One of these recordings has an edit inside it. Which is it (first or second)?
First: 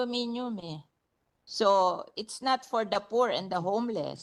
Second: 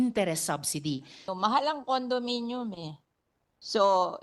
second